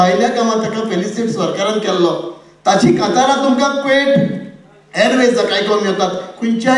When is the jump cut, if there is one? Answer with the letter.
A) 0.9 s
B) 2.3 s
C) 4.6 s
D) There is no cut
D